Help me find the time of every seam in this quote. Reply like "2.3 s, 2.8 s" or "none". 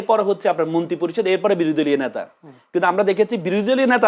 none

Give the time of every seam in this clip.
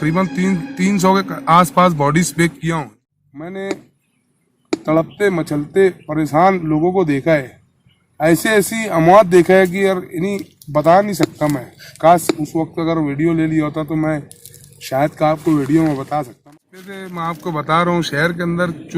2.9 s, 16.3 s

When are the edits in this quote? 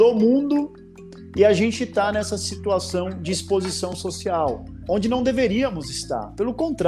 4.8 s

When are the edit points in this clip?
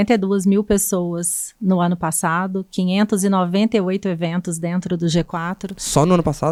none

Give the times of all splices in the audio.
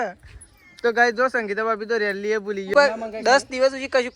2.7 s

